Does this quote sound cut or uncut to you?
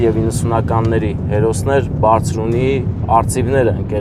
uncut